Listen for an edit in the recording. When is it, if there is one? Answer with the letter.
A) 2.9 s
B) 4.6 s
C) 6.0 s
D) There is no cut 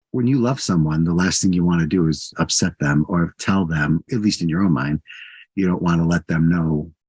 D